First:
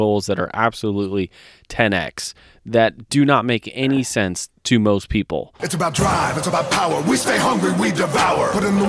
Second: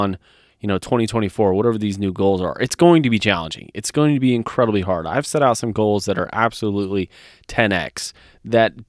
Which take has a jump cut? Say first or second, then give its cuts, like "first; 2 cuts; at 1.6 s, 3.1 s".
first; 1 cut; at 5.6 s